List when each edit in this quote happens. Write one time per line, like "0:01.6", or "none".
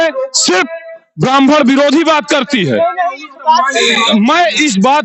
none